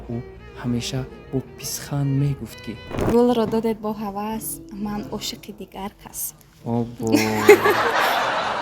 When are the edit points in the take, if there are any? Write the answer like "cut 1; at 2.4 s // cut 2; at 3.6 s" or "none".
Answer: cut 1; at 3.0 s